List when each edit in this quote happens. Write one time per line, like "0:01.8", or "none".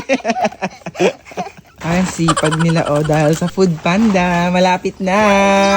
0:01.7